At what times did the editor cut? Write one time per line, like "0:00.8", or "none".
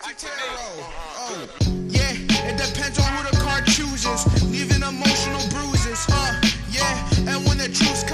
none

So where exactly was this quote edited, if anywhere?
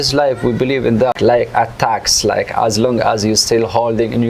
0:01.1

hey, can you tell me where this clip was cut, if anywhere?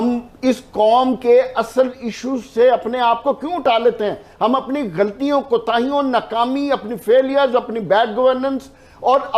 none

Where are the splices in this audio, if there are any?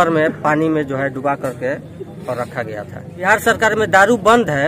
0:03.2

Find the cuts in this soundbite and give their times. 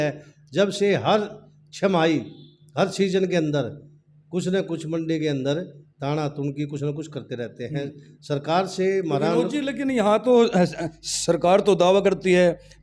none

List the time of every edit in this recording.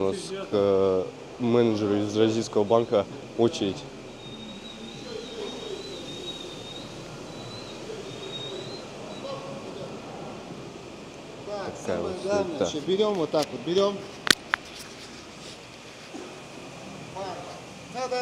none

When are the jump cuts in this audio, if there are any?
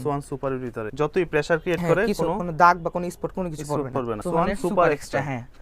0:00.9
0:04.2

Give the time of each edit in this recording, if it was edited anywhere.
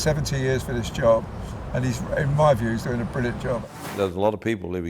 0:03.6

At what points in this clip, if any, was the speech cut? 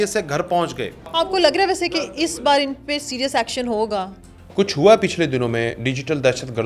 0:01.1

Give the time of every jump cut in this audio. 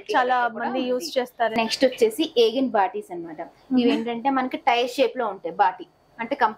0:01.5

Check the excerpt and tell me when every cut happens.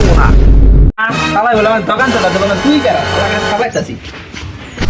none

